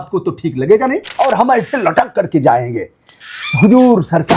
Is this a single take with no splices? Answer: no; 1 cut; at 1.1 s

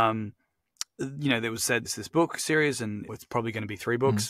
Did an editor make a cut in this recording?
yes; 2 cuts; at 1.9 s, 3.1 s

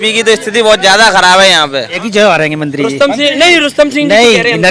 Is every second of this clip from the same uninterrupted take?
no; 1 cut; at 1.9 s

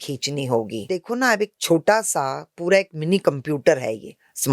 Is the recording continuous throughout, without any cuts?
no; 1 cut; at 1.0 s

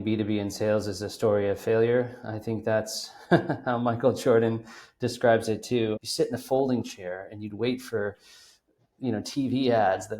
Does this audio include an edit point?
yes; 1 cut; at 6.0 s

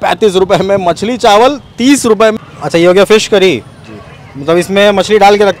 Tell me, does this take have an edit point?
yes; 1 cut; at 2.4 s

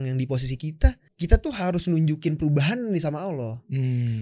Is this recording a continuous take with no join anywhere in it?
no; 1 cut; at 1.1 s

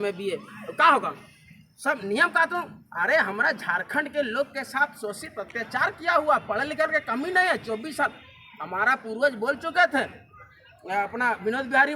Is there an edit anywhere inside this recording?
no; 0 cuts

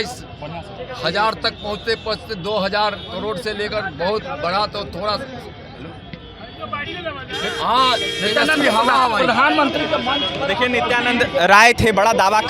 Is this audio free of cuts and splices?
yes; 0 cuts

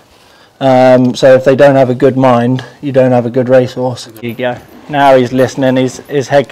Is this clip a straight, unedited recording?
no; 1 cut; at 4.3 s

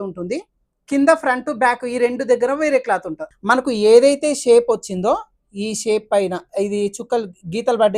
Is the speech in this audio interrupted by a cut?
yes; 1 cut; at 3.3 s

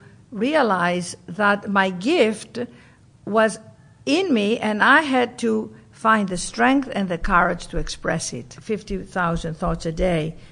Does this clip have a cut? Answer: yes; 1 cut; at 8.5 s

